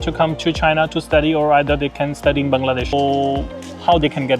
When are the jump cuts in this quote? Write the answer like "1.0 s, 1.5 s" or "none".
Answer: 2.9 s